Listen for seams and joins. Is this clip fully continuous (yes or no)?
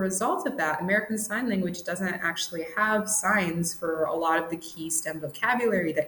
yes